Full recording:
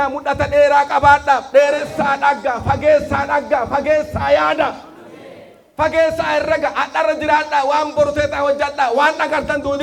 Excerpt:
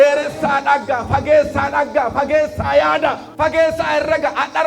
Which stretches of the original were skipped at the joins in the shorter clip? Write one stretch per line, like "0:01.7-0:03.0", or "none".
0:04.8-0:05.7